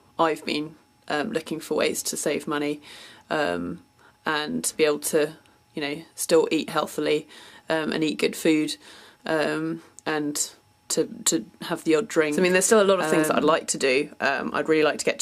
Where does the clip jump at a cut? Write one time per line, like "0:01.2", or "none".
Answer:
0:11.8